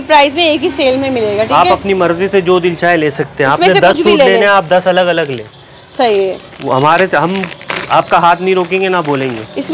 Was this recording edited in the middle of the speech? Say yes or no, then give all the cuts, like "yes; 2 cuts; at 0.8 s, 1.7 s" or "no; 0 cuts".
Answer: no; 0 cuts